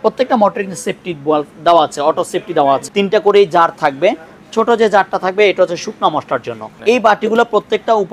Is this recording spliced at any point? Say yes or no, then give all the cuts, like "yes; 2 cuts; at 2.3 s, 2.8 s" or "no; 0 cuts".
yes; 2 cuts; at 2.9 s, 6.7 s